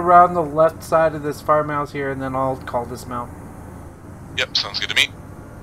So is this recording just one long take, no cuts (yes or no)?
yes